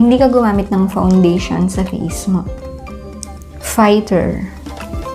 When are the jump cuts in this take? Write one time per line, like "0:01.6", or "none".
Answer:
0:02.6